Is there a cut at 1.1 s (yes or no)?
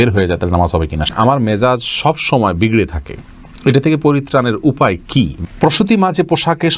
yes